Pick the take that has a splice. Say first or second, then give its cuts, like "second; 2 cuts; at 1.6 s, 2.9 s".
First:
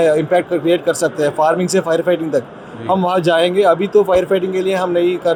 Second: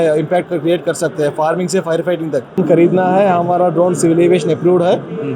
second; 1 cut; at 2.6 s